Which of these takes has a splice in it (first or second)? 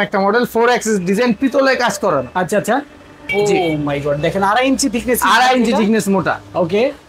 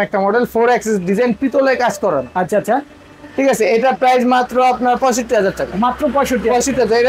first